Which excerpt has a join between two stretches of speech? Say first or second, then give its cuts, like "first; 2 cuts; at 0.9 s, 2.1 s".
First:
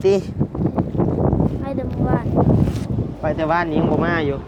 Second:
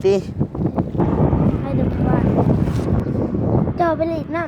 second; 1 cut; at 2.7 s